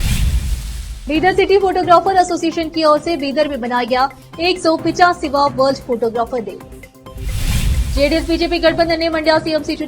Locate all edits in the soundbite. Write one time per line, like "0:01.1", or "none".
0:00.9